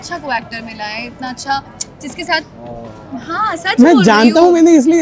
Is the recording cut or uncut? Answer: uncut